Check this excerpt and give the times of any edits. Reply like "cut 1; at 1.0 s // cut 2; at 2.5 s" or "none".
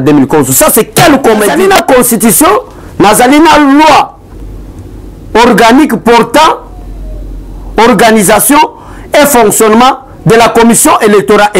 cut 1; at 1.5 s